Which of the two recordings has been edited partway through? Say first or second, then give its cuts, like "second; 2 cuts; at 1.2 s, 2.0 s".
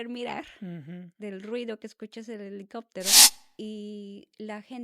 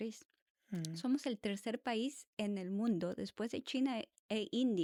first; 1 cut; at 3.4 s